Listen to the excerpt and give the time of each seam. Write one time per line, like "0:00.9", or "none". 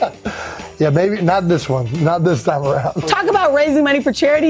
0:03.0